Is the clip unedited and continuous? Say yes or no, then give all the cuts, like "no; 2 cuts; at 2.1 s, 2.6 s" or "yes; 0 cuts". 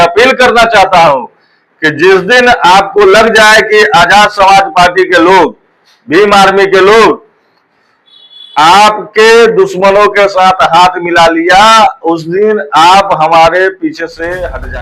yes; 0 cuts